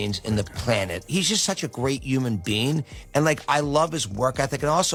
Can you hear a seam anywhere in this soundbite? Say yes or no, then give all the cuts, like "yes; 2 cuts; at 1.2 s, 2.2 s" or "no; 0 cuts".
no; 0 cuts